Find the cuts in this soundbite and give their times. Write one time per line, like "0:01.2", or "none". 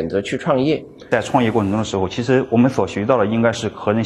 0:00.9